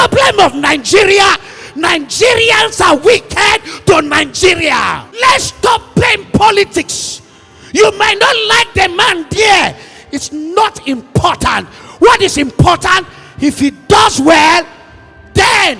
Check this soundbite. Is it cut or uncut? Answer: cut